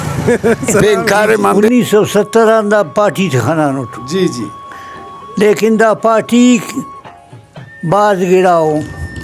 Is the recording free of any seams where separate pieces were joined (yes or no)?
no